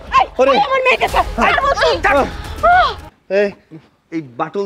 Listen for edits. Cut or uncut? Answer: cut